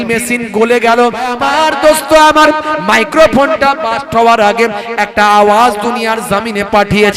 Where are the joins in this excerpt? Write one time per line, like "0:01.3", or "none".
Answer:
0:01.4